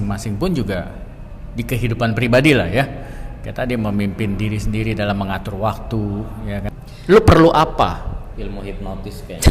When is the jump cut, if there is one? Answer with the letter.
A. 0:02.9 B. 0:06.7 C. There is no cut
B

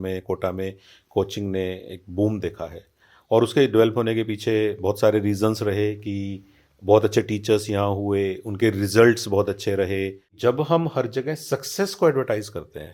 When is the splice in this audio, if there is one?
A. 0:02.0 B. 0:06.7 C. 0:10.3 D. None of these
C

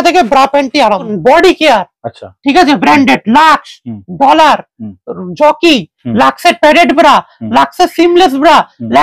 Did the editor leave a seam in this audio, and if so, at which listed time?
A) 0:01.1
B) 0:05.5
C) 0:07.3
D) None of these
A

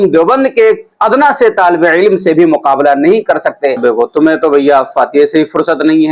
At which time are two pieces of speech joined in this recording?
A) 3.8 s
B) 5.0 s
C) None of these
A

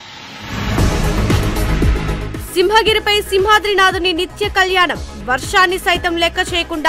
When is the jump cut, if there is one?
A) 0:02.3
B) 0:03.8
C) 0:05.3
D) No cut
A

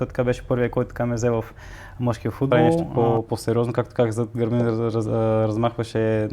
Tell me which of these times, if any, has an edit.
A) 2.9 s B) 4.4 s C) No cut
A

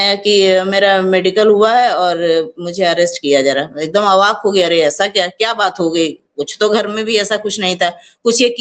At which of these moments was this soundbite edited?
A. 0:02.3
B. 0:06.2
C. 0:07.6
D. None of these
D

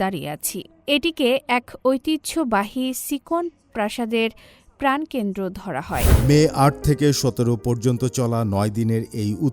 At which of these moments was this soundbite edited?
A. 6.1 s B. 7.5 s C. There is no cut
A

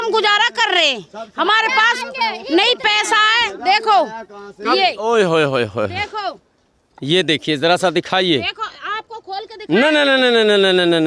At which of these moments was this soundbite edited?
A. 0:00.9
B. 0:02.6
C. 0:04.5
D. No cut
D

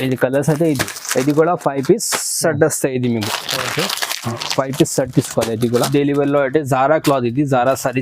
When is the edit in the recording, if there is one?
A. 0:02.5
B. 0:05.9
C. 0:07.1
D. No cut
B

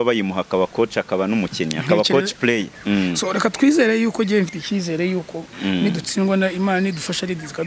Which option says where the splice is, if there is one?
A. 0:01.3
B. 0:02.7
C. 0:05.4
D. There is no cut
B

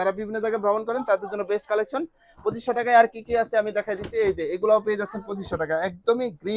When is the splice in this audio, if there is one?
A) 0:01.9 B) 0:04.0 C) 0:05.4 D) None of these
D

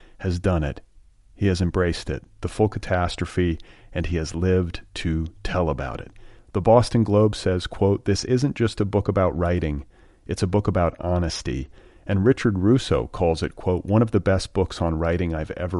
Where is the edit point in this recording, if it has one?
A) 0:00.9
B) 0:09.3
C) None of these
C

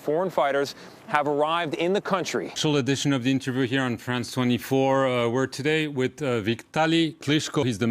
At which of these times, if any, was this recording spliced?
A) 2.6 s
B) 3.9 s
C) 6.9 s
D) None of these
A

